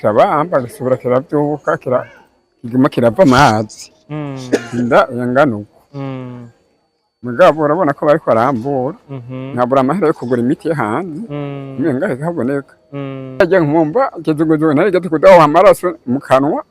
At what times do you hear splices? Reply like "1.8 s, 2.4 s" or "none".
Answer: 13.4 s